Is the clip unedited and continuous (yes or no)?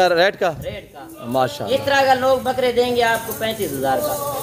yes